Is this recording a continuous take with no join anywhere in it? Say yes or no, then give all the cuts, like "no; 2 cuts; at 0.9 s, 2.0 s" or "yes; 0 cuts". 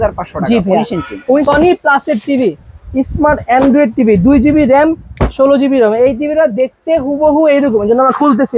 no; 1 cut; at 1.4 s